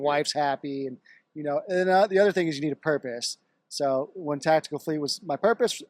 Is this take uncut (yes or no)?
yes